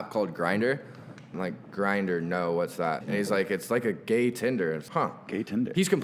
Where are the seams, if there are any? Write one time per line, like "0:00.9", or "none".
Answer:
0:01.3
0:03.0
0:04.8